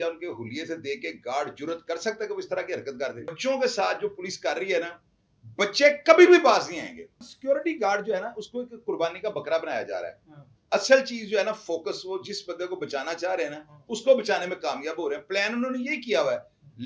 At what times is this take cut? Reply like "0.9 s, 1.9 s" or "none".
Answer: 3.4 s, 7.3 s